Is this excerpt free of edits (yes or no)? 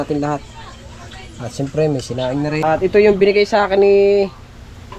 no